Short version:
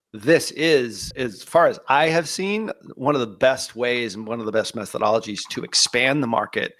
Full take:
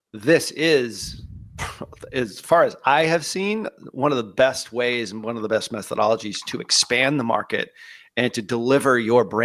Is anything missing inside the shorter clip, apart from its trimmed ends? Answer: yes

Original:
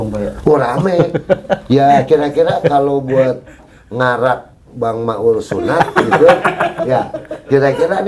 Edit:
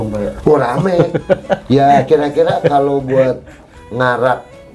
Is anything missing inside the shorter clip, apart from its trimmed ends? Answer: no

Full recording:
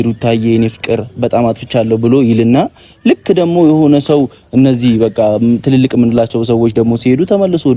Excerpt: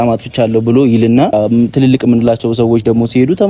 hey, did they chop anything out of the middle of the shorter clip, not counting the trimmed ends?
yes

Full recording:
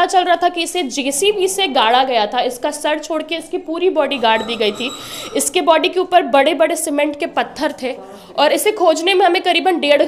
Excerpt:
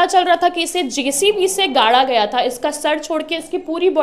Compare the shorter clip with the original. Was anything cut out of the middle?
no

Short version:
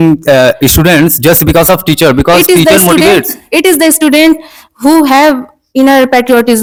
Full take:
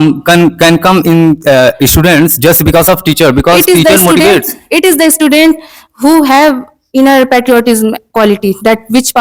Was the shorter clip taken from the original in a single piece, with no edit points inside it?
yes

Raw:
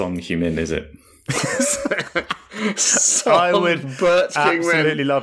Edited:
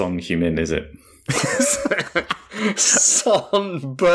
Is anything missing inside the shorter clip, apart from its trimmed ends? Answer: no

